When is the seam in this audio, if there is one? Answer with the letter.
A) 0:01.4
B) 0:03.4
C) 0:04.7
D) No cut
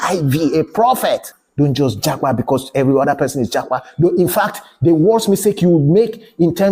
A